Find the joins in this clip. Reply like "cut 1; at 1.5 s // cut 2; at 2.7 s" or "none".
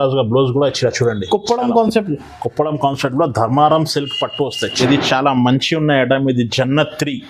cut 1; at 4.8 s